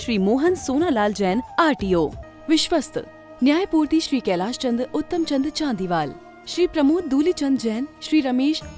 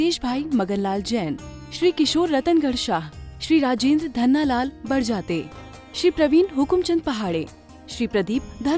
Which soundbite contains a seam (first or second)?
first